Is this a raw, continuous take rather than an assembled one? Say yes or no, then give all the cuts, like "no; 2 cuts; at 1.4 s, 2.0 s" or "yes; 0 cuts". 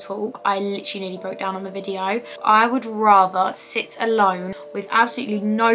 no; 1 cut; at 2.3 s